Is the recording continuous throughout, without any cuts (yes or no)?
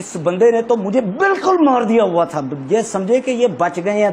yes